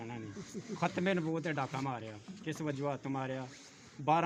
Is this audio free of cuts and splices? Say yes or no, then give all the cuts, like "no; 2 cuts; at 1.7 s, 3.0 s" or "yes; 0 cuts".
yes; 0 cuts